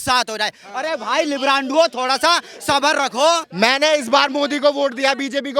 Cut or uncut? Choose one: cut